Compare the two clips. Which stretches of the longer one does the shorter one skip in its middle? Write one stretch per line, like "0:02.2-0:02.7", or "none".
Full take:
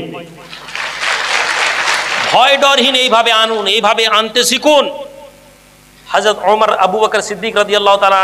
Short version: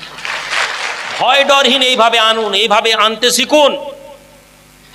0:01.5-0:02.1